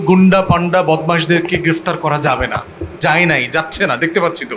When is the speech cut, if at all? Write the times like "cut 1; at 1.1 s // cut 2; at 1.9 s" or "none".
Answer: none